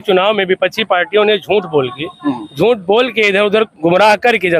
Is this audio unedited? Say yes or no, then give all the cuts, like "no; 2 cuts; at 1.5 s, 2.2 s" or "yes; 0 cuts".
yes; 0 cuts